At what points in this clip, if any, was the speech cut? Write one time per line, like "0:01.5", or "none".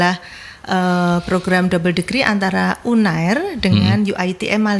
none